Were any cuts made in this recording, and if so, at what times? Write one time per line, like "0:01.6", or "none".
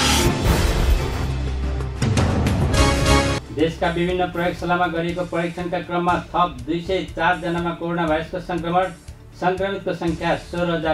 0:03.2